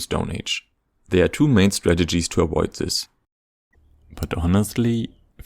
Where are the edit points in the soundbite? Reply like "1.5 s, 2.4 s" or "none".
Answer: 3.4 s